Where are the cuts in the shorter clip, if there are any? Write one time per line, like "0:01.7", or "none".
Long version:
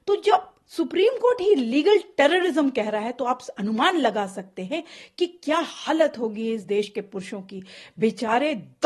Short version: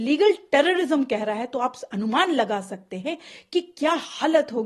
none

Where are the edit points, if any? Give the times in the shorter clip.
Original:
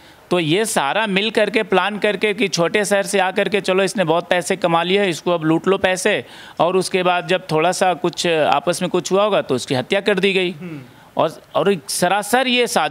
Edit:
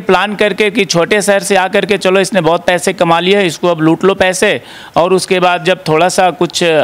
none

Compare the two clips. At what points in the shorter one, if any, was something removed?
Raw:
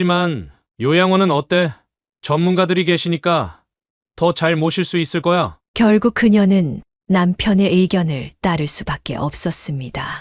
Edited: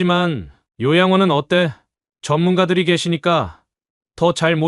none

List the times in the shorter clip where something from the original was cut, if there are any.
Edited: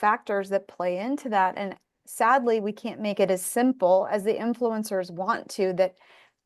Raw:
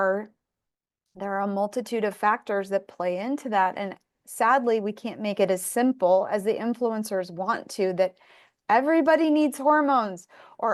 none

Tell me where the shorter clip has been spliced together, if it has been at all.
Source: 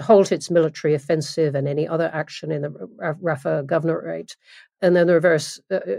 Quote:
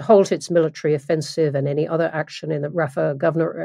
0:02.7

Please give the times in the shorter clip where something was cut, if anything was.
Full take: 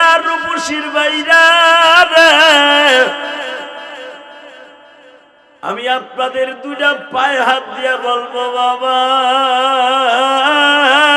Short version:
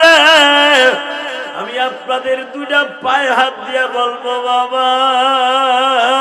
0:01.6

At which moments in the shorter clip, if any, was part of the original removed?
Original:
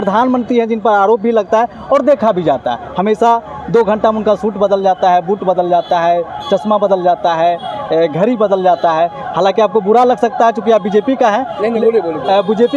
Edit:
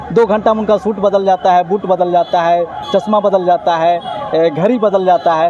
none

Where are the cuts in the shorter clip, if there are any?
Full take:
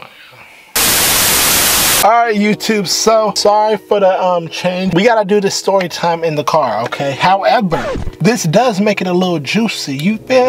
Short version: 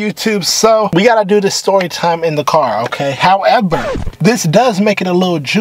0:00.9

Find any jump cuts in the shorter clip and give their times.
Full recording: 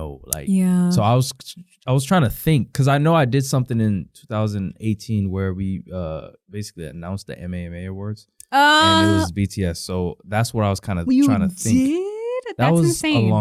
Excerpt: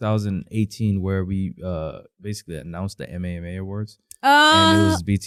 none

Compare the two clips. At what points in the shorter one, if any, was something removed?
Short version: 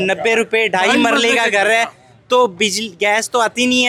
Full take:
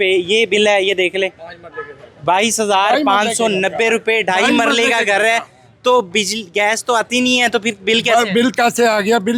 none

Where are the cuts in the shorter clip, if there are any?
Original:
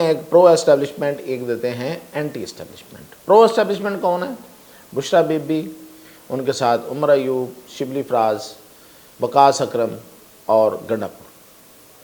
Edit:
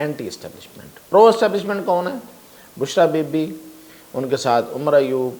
none

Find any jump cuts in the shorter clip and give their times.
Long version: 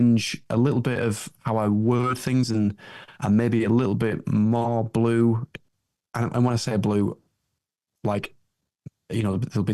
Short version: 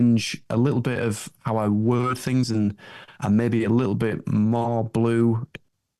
none

